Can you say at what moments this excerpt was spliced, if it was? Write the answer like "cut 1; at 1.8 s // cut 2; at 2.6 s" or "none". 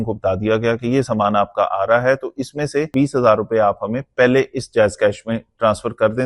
cut 1; at 2.9 s